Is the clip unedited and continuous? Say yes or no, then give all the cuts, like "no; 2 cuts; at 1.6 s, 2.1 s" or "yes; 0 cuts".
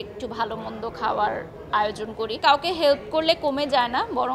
no; 1 cut; at 2.4 s